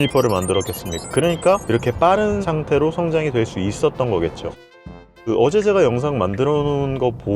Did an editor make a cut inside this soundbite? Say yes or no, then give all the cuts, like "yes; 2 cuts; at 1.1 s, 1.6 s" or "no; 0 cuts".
yes; 1 cut; at 4.6 s